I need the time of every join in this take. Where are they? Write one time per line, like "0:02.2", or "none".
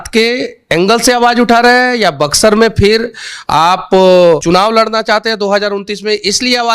0:04.4

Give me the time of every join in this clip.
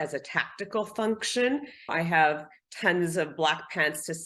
0:01.9

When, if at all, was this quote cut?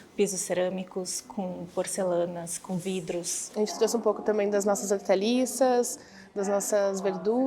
0:03.5

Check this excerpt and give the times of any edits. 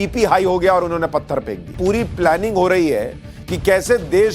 0:01.6

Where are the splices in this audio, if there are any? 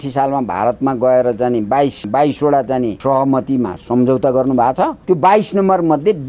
0:02.0
0:03.0
0:05.0

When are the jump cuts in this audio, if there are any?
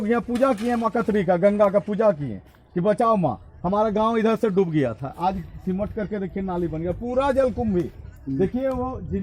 none

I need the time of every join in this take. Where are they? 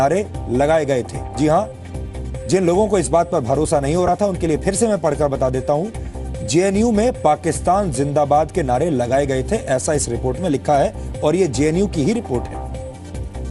none

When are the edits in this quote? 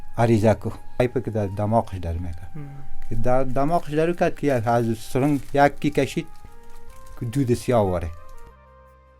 0:01.0

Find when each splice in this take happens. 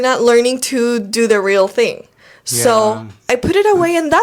none

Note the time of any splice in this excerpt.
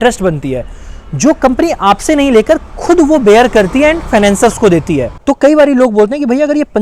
0:05.1

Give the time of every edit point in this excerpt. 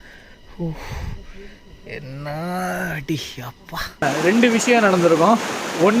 0:04.0

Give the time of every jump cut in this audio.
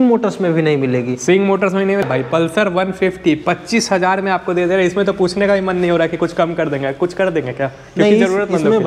0:02.0

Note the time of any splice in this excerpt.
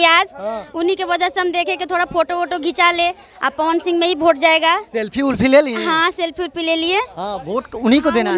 none

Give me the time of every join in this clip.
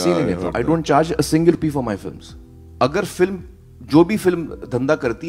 0:01.6

